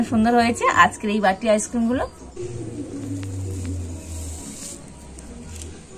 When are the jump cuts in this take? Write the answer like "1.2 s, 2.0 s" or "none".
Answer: 2.2 s